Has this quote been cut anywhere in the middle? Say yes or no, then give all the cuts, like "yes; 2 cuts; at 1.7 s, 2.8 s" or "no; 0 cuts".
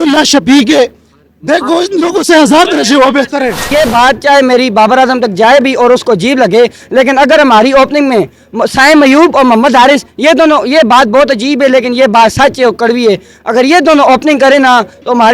yes; 1 cut; at 3.7 s